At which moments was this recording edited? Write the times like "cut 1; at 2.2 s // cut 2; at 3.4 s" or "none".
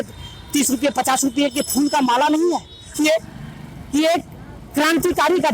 cut 1; at 2.9 s